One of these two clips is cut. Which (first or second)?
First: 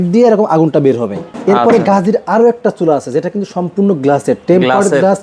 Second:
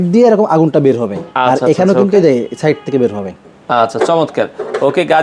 first